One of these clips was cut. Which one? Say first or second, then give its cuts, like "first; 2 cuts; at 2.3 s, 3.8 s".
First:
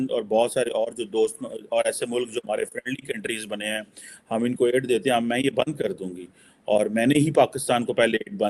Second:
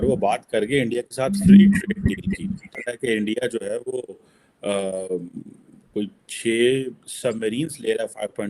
second; 1 cut; at 2.8 s